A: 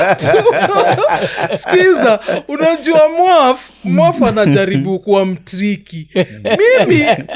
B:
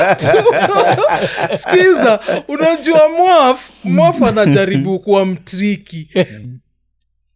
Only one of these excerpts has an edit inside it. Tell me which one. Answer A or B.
B